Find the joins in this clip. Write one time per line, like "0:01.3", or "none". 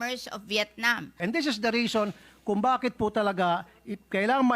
0:01.2